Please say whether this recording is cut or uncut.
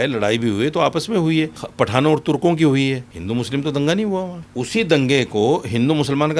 cut